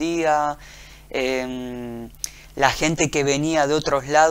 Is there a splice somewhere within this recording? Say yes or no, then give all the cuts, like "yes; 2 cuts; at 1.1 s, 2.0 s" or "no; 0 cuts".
no; 0 cuts